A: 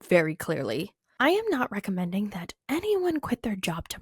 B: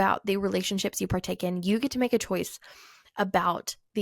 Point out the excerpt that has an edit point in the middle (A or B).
A